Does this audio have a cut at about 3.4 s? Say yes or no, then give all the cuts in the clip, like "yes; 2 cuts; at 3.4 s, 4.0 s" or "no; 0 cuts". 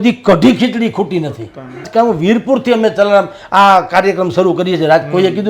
no; 1 cut; at 1.9 s